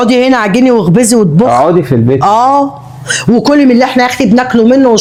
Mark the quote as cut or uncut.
uncut